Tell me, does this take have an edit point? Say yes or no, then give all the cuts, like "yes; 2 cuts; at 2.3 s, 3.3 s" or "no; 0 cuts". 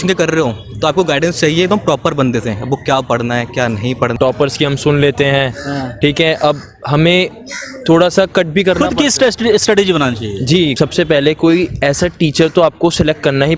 yes; 2 cuts; at 4.1 s, 10.7 s